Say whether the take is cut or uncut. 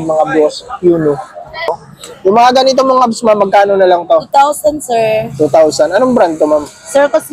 cut